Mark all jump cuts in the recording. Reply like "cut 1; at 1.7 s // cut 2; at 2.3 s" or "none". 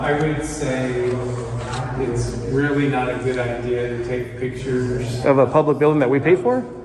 none